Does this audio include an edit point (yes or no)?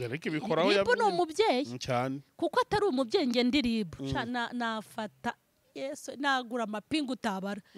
no